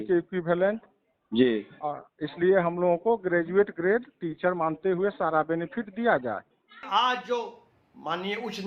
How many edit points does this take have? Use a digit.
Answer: 1